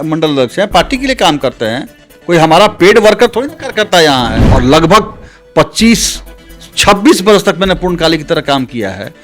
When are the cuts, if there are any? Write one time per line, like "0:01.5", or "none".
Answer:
0:04.4